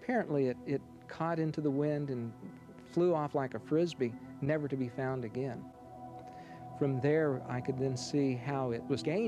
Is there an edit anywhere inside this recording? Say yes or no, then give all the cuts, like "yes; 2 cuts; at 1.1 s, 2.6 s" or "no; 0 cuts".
no; 0 cuts